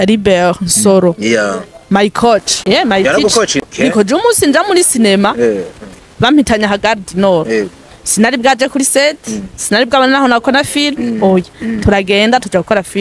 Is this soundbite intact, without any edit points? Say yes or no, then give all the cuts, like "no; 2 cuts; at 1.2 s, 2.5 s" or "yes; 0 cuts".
no; 2 cuts; at 2.5 s, 3.6 s